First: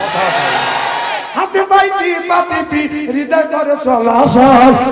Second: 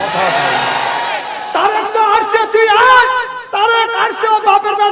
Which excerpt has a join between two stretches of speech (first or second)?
first